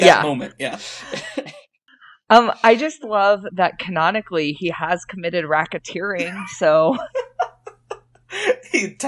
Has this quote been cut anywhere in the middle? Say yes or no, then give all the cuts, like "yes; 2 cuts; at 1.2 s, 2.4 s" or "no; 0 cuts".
no; 0 cuts